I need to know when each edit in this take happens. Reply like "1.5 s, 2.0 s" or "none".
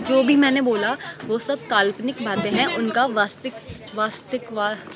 none